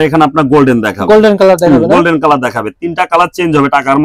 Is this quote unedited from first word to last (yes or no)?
yes